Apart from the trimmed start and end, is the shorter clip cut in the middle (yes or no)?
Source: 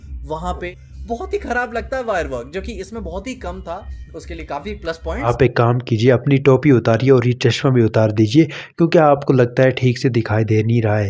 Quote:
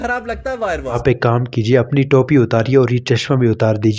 yes